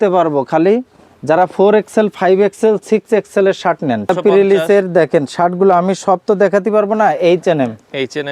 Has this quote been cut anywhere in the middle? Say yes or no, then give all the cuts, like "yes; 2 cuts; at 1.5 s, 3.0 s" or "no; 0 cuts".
yes; 1 cut; at 4.1 s